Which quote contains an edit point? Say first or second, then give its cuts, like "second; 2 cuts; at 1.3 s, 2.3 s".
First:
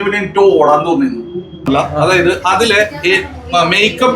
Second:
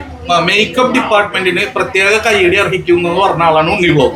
first; 1 cut; at 1.7 s